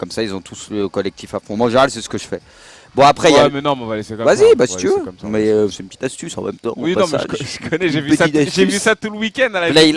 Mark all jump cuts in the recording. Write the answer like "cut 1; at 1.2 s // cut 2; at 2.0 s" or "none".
none